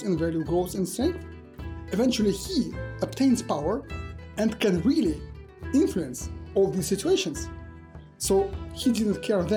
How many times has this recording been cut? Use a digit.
0